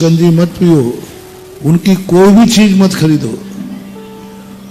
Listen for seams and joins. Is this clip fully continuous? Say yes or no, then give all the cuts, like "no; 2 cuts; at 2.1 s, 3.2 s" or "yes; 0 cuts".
yes; 0 cuts